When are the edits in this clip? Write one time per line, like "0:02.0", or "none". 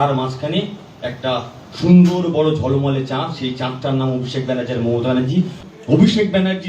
0:05.6

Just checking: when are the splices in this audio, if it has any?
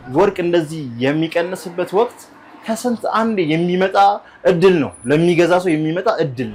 none

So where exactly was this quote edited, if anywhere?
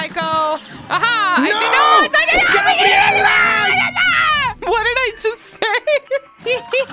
0:04.6

